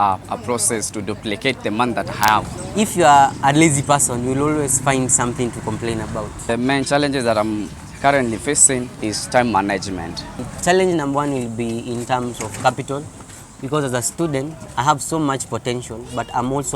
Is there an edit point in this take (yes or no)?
yes